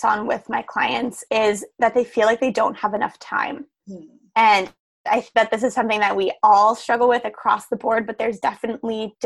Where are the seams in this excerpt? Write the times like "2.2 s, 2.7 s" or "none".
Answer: none